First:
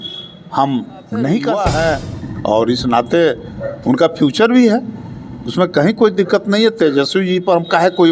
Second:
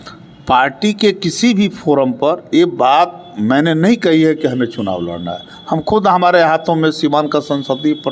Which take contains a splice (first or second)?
first